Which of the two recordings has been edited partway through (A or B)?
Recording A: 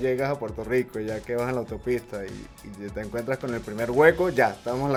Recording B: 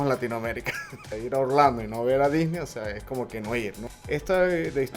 B